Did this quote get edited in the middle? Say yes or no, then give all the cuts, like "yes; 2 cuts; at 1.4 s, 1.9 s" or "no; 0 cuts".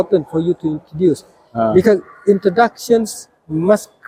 no; 0 cuts